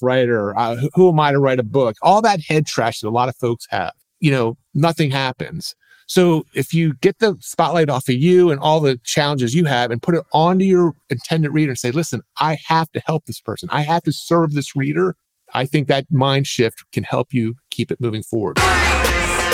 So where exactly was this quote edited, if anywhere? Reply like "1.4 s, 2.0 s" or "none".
18.5 s